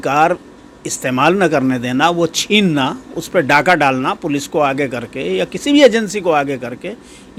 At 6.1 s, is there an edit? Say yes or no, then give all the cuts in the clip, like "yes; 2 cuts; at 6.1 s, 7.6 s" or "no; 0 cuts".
no; 0 cuts